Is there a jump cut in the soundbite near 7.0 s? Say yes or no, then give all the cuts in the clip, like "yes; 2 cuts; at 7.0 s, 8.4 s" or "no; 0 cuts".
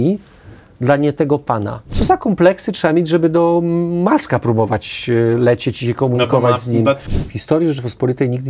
yes; 2 cuts; at 1.9 s, 7.0 s